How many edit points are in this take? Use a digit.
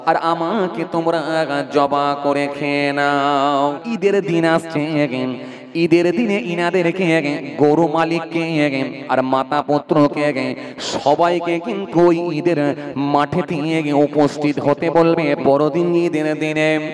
2